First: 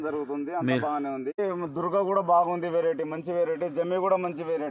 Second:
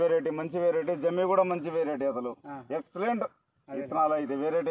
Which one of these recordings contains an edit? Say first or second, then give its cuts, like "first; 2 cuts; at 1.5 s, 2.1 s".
first; 1 cut; at 1.4 s